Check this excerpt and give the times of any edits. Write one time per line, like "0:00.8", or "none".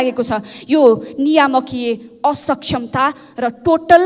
none